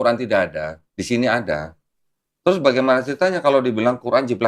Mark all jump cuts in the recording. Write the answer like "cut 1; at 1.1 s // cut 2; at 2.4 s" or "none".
none